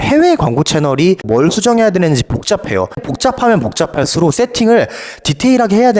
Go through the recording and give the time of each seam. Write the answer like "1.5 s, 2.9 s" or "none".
1.3 s